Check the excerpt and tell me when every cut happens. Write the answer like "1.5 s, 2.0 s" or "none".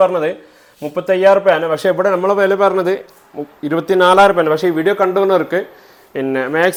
none